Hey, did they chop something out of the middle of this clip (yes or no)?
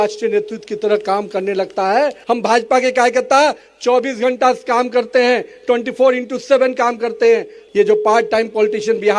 yes